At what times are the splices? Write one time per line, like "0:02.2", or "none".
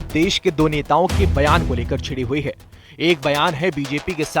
none